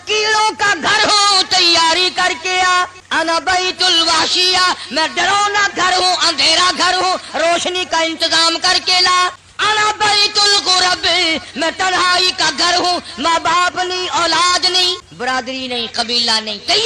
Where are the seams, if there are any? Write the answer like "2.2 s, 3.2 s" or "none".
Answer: 3.0 s, 9.5 s, 15.1 s